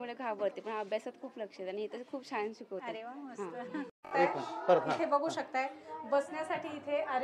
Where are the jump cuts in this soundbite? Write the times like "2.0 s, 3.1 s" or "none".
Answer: none